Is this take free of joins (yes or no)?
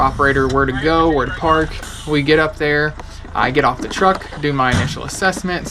no